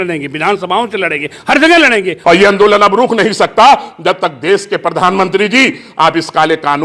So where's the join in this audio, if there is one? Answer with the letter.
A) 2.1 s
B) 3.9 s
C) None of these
A